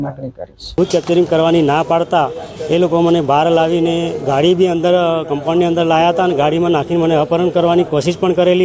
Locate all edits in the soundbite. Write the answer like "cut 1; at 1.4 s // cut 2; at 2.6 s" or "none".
cut 1; at 1.4 s